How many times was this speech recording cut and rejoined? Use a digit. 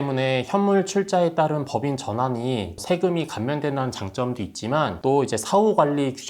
1